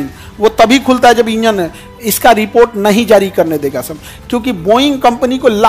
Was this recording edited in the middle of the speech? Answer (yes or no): no